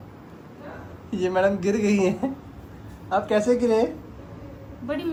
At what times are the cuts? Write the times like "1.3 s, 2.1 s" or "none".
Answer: none